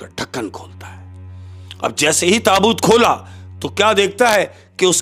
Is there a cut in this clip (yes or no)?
no